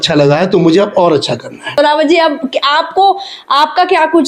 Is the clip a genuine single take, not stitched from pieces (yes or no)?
no